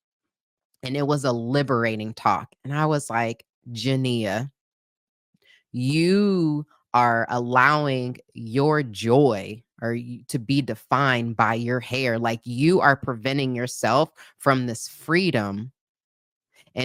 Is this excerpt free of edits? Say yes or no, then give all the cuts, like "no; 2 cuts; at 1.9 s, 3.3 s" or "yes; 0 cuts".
yes; 0 cuts